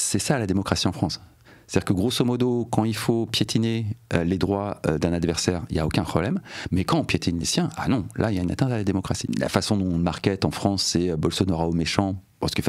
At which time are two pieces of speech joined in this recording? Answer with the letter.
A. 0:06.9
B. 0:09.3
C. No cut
B